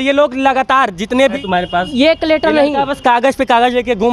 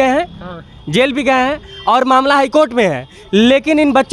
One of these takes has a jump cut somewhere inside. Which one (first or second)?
first